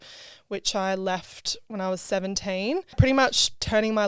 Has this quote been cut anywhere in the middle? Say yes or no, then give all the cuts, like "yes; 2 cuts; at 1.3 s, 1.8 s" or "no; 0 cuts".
yes; 1 cut; at 3.1 s